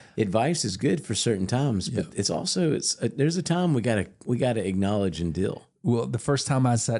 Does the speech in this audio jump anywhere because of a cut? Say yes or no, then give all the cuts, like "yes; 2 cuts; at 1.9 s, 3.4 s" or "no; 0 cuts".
no; 0 cuts